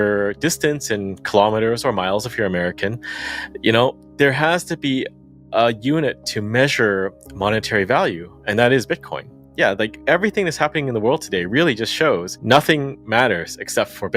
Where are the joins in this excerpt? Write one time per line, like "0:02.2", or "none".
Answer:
0:09.4
0:12.3